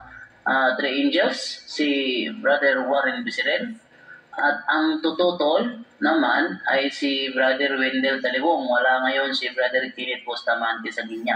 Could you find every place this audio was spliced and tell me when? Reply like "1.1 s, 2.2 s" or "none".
3.8 s